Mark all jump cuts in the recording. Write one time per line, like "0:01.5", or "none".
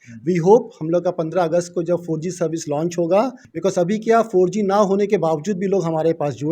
0:03.4